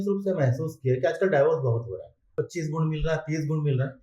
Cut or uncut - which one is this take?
cut